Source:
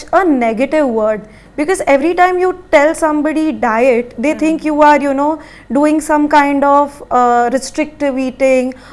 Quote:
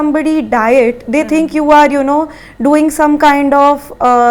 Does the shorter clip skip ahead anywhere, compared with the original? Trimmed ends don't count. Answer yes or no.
no